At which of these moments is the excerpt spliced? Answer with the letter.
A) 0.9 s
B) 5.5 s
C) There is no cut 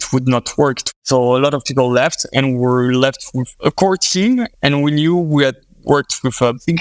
A